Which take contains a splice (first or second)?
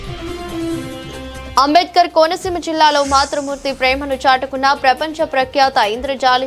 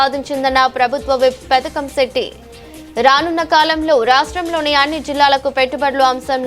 first